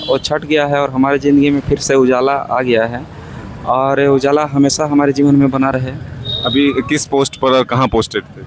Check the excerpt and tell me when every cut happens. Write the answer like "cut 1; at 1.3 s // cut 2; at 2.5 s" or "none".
none